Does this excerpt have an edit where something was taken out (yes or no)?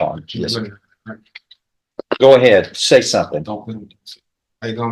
no